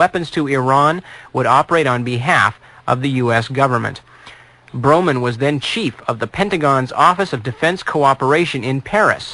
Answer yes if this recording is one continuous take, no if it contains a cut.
no